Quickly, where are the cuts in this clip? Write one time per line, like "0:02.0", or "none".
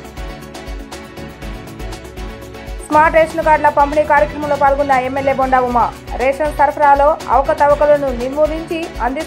0:01.3